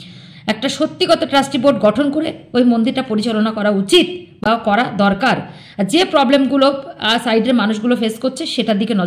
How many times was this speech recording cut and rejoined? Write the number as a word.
zero